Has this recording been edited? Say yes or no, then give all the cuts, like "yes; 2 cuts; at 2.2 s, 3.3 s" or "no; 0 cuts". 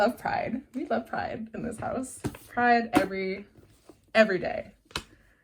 no; 0 cuts